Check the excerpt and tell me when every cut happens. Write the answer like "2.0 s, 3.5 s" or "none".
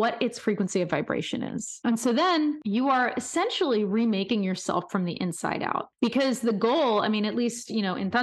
1.7 s, 2.6 s, 5.9 s